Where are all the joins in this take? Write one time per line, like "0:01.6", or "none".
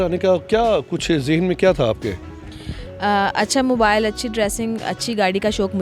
none